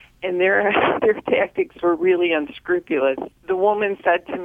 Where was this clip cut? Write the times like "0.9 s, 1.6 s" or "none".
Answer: 3.3 s